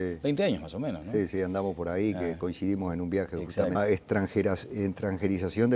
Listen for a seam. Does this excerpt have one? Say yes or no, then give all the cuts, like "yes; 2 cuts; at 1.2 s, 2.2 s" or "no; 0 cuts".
no; 0 cuts